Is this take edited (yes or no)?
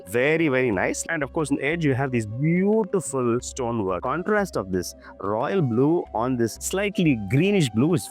yes